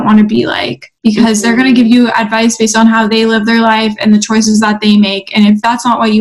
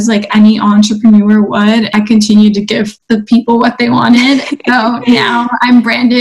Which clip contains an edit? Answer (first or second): second